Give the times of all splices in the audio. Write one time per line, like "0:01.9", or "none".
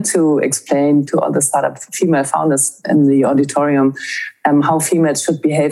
0:01.1
0:02.9